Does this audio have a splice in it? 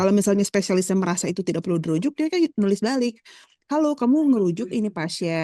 no; 0 cuts

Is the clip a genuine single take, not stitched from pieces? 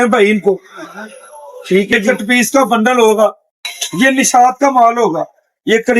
no; 1 cut; at 2.0 s

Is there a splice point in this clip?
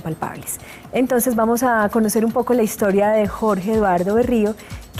no; 0 cuts

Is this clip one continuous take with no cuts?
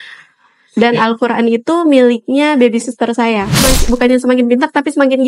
no; 1 cut; at 3.7 s

